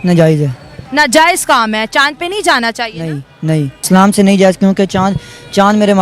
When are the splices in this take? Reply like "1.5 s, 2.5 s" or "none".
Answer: 3.8 s